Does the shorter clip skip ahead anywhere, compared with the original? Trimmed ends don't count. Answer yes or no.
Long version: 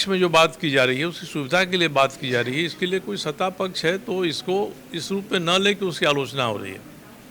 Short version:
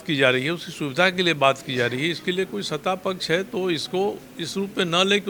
no